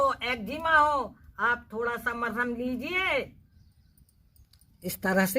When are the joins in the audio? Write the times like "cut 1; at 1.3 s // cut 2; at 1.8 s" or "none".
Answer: cut 1; at 3.5 s